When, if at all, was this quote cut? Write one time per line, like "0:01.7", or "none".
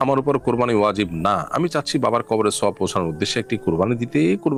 none

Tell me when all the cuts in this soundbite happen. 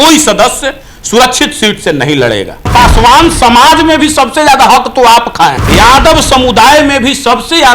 0:02.7
0:05.6

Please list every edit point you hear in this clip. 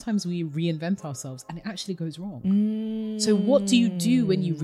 none

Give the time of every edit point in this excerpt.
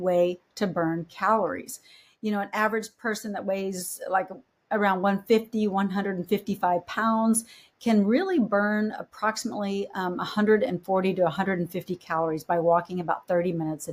none

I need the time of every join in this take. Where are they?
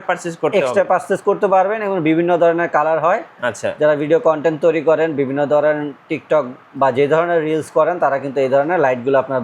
none

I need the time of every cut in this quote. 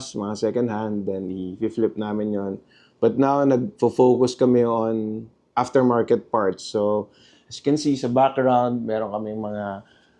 none

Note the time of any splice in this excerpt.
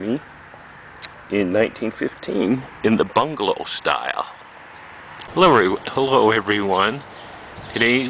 0:05.3

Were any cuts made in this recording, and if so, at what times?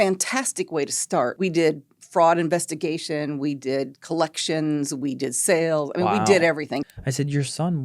0:01.3
0:06.8

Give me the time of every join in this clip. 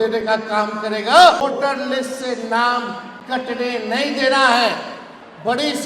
0:01.4

